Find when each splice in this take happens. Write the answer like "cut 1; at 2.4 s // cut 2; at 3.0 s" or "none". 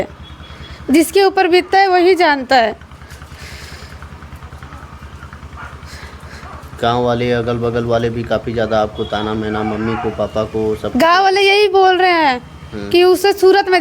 none